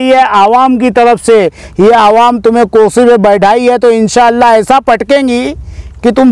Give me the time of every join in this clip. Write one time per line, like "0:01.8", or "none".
none